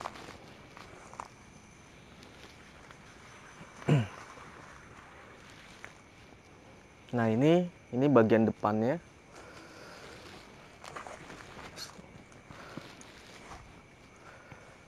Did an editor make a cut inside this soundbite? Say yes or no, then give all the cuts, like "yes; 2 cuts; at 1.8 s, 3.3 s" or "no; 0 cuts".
no; 0 cuts